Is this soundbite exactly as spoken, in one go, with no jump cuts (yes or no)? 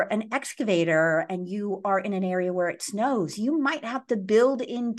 yes